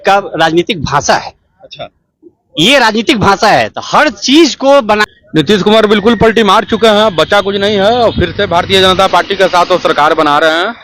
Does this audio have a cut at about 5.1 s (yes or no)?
yes